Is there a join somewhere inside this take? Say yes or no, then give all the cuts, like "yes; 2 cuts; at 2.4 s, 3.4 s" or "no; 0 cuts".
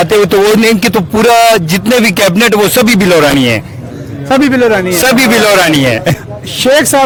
no; 0 cuts